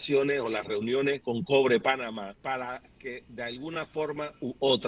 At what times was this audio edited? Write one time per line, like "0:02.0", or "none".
0:01.2
0:02.5